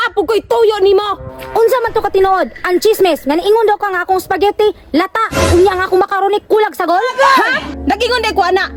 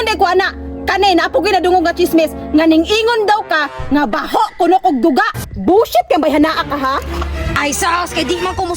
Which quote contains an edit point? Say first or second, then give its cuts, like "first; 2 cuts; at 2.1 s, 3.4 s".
second; 1 cut; at 5.5 s